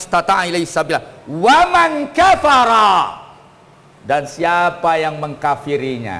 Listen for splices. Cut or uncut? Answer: uncut